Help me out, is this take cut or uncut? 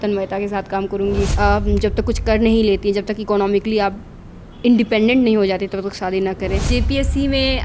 cut